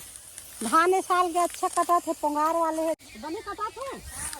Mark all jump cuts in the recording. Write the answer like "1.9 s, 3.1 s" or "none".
3.0 s